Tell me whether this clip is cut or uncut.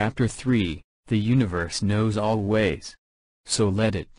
uncut